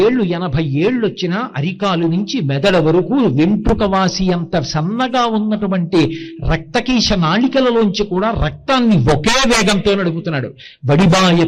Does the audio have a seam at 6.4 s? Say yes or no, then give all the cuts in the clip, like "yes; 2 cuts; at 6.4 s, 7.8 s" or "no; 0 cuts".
no; 0 cuts